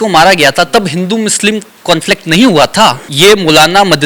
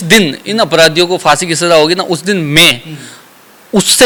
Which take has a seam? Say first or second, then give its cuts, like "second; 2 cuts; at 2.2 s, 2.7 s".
first; 1 cut; at 3.1 s